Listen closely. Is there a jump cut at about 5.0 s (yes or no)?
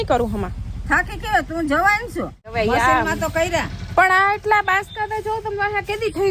no